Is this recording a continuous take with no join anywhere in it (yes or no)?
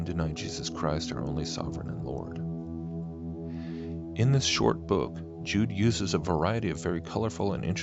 yes